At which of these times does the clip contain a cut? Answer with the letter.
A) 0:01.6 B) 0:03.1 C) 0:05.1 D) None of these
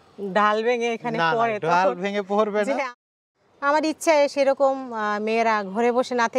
B